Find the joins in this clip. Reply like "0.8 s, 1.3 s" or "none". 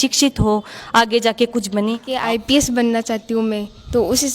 2.1 s